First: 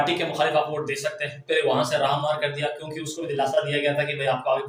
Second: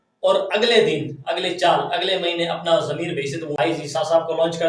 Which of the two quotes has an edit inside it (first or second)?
second